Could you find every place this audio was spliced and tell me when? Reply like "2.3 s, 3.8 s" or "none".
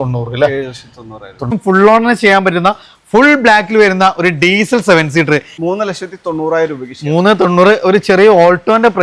1.5 s, 5.5 s